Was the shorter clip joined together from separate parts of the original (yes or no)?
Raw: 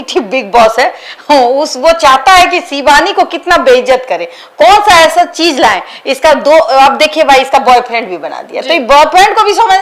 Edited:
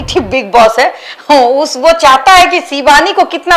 no